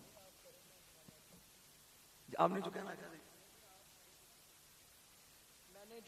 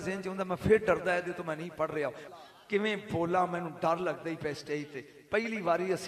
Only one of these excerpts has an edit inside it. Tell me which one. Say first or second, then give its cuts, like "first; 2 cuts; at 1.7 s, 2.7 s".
second; 1 cut; at 2.2 s